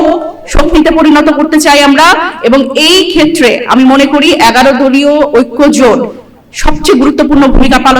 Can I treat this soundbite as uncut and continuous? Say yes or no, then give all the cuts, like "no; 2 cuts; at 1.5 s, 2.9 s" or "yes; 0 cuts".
yes; 0 cuts